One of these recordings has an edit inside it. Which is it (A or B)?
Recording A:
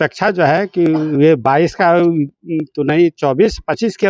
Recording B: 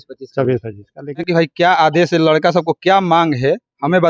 B